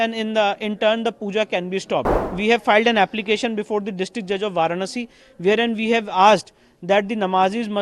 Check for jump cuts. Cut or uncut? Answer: cut